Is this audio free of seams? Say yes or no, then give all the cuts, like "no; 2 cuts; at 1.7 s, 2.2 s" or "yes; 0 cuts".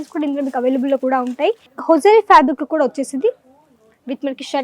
no; 1 cut; at 1.7 s